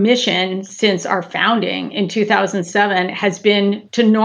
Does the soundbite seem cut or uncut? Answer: uncut